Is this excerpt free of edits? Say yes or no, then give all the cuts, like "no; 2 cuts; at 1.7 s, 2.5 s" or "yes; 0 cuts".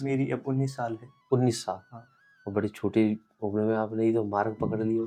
yes; 0 cuts